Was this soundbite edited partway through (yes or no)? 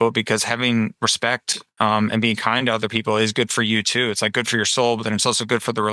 no